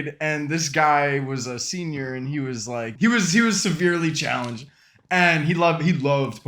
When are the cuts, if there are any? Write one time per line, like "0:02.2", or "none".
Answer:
0:02.8